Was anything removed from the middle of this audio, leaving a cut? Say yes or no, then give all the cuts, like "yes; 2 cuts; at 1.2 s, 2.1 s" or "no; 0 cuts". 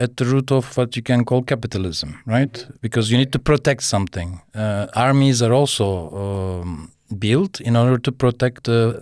no; 0 cuts